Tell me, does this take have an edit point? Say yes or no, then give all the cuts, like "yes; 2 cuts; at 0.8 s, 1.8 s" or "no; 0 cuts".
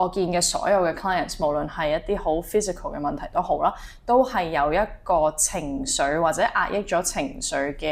no; 0 cuts